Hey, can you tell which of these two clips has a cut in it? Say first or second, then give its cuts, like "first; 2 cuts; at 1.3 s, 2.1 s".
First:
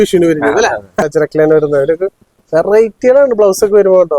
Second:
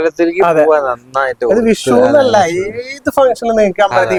first; 1 cut; at 1.1 s